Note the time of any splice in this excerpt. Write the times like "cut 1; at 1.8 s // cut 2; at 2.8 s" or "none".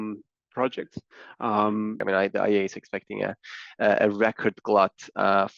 cut 1; at 2.0 s